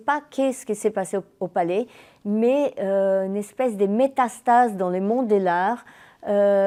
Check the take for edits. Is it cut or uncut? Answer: uncut